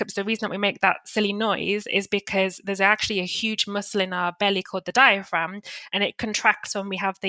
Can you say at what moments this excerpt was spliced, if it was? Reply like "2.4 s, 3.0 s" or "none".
none